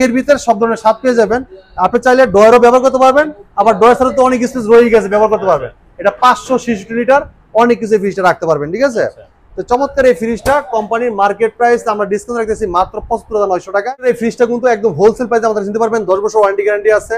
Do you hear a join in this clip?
no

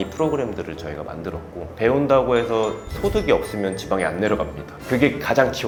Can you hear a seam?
no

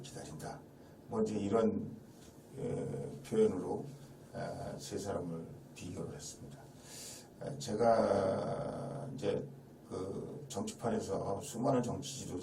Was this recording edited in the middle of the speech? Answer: no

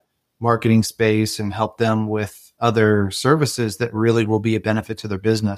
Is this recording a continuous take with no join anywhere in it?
yes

